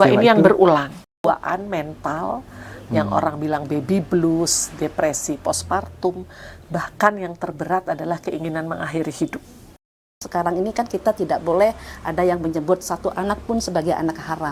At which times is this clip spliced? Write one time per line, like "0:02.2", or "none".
0:01.2
0:10.0